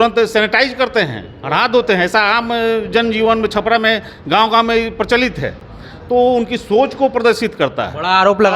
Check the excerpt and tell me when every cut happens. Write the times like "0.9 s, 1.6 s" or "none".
none